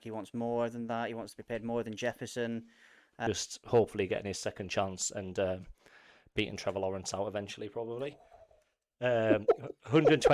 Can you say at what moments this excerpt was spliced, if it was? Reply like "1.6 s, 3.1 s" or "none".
3.2 s